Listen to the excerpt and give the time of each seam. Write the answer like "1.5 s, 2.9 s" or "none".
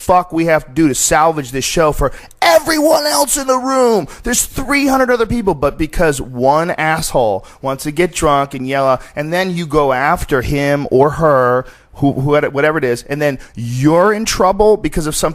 4.2 s